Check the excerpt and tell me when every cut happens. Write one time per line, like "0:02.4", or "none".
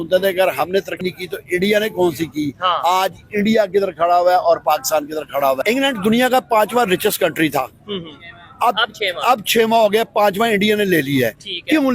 0:00.9
0:05.6